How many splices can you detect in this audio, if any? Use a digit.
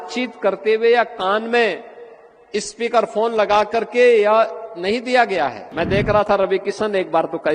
1